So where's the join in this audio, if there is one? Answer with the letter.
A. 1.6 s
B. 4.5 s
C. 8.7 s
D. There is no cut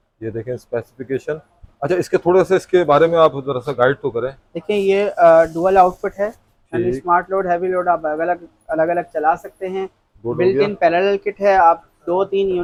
D